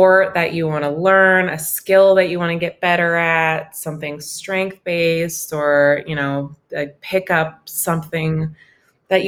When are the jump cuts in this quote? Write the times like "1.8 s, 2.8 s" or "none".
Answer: none